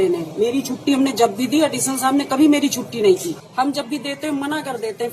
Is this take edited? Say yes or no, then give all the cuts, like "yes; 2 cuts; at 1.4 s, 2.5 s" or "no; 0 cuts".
yes; 1 cut; at 3.4 s